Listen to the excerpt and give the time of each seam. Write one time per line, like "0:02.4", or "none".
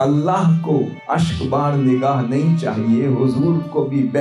0:01.0